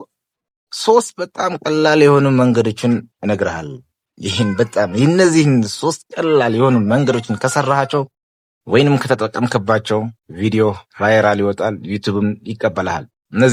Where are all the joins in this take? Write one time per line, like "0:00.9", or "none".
none